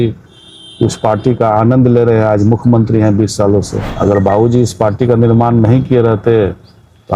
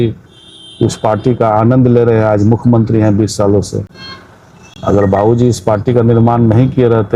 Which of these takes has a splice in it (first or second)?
first